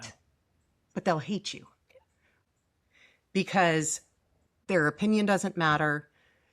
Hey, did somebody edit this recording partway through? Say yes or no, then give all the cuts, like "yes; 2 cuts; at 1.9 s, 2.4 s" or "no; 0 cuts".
yes; 2 cuts; at 2.4 s, 4.5 s